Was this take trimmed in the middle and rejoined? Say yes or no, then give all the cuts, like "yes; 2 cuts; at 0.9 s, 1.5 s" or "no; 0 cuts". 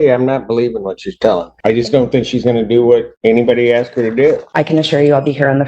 yes; 3 cuts; at 1.5 s, 3.1 s, 4.5 s